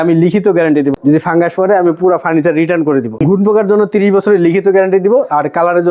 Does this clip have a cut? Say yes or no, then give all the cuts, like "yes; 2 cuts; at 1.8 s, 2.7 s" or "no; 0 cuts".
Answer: yes; 2 cuts; at 0.9 s, 3.2 s